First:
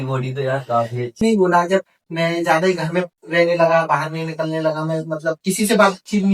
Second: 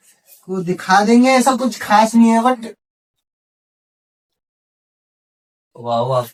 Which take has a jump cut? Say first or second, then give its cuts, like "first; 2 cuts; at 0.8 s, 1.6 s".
first; 1 cut; at 1.2 s